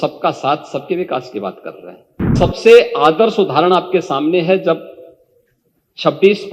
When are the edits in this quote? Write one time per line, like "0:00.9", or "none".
0:02.3